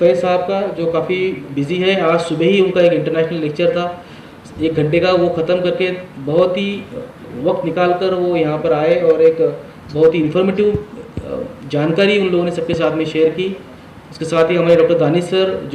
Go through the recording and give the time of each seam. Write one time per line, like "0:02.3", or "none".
none